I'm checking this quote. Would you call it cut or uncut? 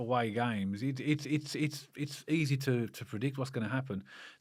uncut